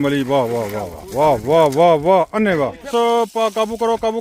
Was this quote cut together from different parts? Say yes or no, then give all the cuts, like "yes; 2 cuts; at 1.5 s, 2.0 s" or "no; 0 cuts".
yes; 1 cut; at 2.9 s